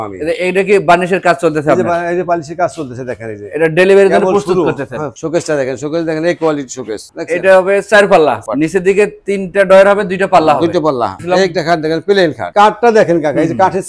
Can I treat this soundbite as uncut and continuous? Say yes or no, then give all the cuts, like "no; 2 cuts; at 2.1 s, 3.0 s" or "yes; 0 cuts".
no; 5 cuts; at 5.1 s, 7.0 s, 8.4 s, 11.2 s, 12.5 s